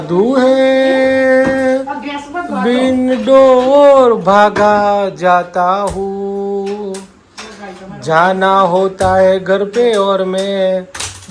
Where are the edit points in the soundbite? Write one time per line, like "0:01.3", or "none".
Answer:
none